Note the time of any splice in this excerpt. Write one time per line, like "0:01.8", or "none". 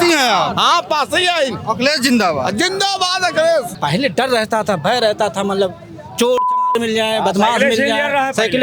0:03.7